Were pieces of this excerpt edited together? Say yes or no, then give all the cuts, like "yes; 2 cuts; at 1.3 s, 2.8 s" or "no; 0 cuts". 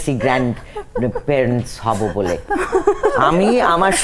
no; 0 cuts